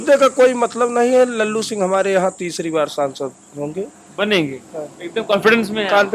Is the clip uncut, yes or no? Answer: yes